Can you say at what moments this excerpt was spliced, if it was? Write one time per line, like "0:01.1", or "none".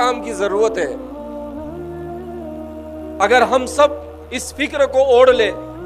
0:01.0
0:03.2